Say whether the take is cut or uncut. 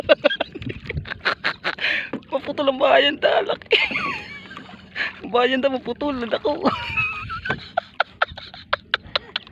uncut